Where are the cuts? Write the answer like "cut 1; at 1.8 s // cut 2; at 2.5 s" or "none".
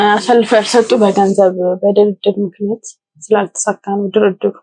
none